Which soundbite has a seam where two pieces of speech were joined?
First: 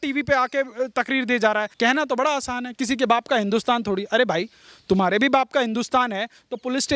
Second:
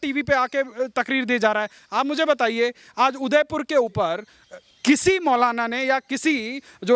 first; 1 cut; at 1.7 s

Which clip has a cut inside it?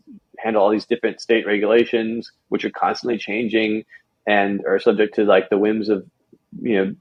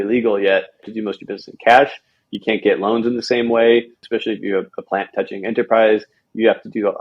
second; 2 cuts; at 0.9 s, 4.0 s

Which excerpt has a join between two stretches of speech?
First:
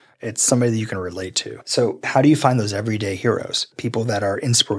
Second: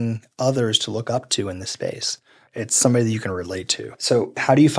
first; 1 cut; at 3.7 s

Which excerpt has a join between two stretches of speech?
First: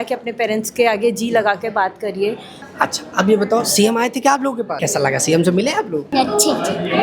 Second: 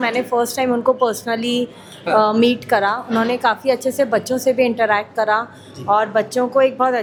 first; 3 cuts; at 2.7 s, 4.7 s, 6.1 s

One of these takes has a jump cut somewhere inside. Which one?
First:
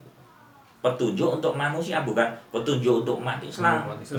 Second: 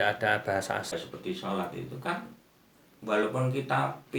second; 1 cut; at 0.9 s

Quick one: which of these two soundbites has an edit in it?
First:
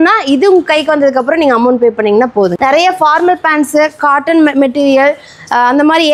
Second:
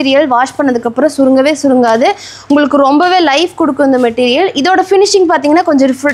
first; 1 cut; at 2.5 s

